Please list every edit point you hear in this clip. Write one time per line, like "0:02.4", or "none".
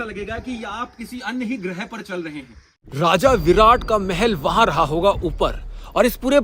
0:02.9

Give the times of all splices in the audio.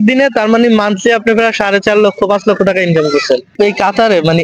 0:03.5

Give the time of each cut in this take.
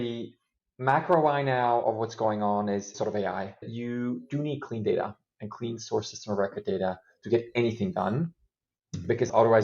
0:03.7

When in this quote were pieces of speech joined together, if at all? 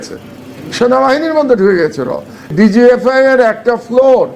0:02.5

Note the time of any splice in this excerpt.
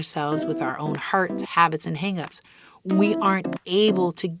none

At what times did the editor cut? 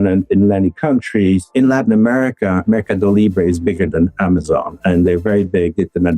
0:01.5

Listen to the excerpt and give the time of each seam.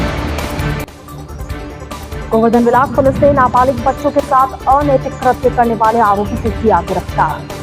0:01.3

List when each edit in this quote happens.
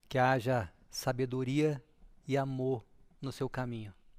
0:02.1

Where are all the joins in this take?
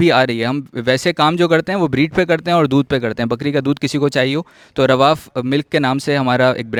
none

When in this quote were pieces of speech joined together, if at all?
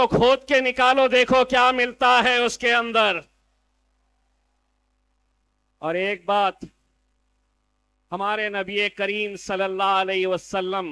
none

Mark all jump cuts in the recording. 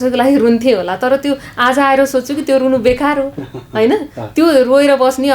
none

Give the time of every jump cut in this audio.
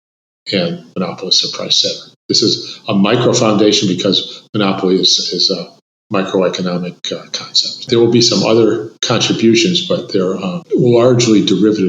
0:07.9
0:08.9
0:10.5

